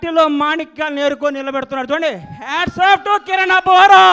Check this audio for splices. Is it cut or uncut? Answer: uncut